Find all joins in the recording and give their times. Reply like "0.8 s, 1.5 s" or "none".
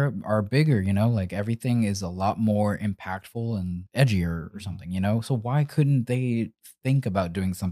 3.8 s